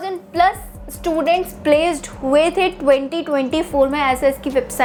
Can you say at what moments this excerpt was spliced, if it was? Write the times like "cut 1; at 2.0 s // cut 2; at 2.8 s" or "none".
none